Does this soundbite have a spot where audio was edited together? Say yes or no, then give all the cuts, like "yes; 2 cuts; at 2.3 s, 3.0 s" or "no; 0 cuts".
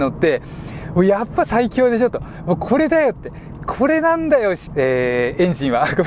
yes; 1 cut; at 4.6 s